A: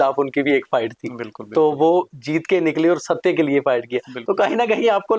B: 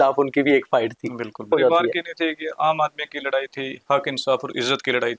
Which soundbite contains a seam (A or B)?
B